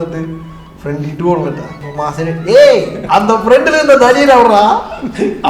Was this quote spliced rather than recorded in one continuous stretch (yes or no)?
yes